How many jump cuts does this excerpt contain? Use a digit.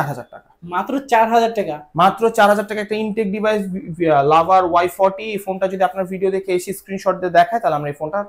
0